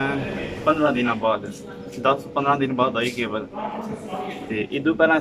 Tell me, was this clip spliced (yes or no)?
no